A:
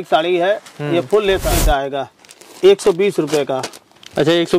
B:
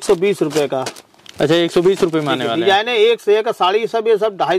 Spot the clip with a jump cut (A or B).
A